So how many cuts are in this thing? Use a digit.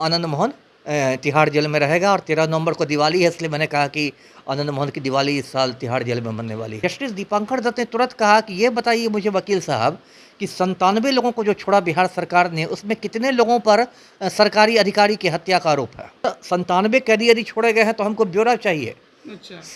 2